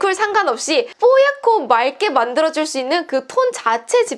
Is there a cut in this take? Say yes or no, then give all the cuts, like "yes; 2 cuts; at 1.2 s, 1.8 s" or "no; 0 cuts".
yes; 1 cut; at 0.9 s